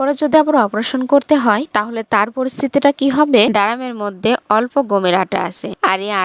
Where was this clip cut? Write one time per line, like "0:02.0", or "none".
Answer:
0:03.5